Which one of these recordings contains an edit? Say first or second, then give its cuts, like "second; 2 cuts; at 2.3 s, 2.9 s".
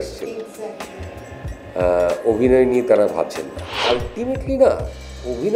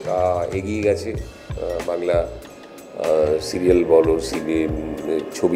first; 1 cut; at 3.9 s